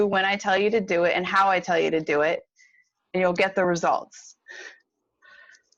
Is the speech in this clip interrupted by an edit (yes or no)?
no